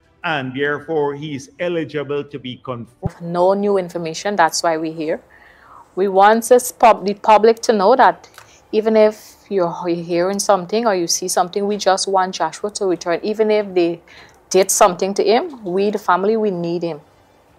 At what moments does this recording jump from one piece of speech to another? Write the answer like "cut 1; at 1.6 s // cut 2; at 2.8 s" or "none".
cut 1; at 3.1 s